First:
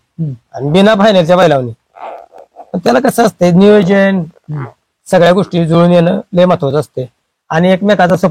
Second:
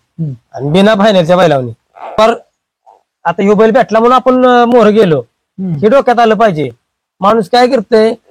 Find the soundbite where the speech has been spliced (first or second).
second